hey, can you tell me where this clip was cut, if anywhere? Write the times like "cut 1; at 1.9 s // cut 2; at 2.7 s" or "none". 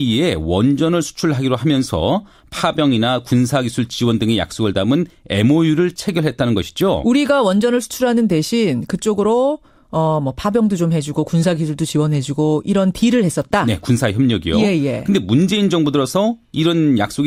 none